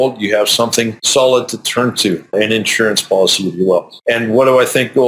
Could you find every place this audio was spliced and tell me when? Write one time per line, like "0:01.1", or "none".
0:01.0
0:02.3
0:03.9